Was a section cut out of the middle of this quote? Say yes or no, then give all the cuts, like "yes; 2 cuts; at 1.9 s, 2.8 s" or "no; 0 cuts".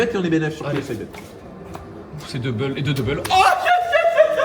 yes; 1 cut; at 1.1 s